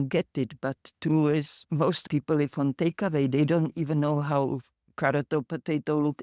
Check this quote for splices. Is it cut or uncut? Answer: uncut